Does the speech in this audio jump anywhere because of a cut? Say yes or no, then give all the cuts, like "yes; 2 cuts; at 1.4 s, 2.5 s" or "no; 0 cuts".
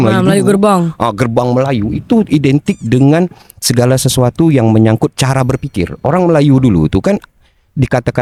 no; 0 cuts